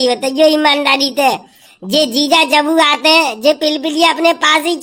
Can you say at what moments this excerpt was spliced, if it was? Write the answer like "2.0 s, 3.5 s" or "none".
none